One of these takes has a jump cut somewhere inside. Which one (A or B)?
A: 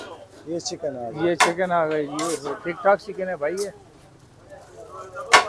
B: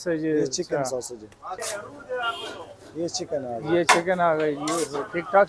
B